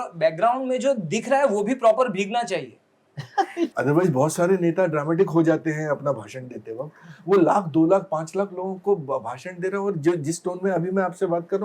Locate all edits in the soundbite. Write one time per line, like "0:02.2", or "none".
0:03.7